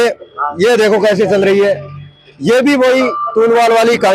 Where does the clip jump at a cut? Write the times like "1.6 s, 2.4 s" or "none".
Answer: none